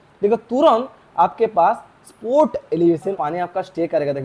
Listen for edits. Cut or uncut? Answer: cut